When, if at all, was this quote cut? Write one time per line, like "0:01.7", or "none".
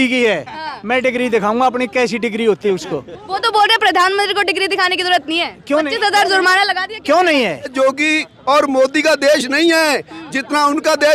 0:07.7

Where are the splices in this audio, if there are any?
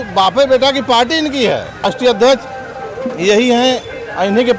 0:01.9

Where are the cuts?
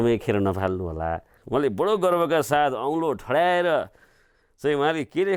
0:01.3

